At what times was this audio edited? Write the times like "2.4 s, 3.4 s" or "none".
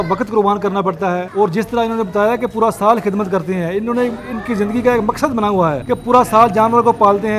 1.3 s, 5.8 s